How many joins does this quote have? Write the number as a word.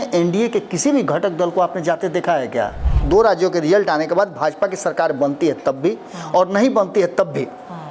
one